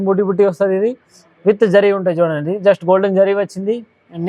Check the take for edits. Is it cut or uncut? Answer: uncut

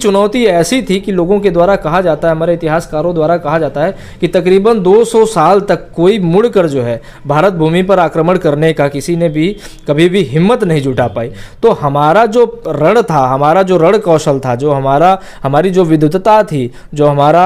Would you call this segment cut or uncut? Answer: uncut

